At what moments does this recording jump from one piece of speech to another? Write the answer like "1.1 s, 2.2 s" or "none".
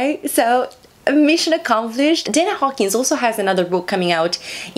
2.3 s